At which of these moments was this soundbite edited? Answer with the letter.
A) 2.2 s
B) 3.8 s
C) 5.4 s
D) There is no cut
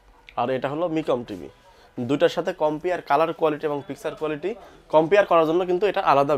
D